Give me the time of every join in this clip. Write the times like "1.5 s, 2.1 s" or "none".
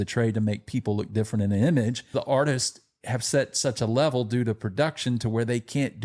2.1 s